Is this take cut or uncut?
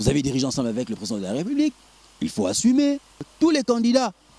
cut